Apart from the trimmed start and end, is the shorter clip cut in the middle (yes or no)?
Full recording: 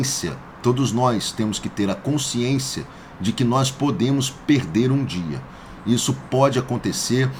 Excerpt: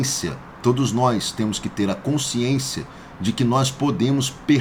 no